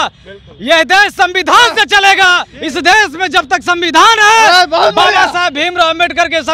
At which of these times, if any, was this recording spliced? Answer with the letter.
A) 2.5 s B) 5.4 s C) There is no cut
A